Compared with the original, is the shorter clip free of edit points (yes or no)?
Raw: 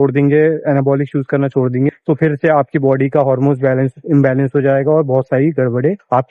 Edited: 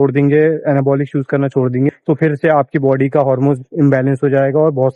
no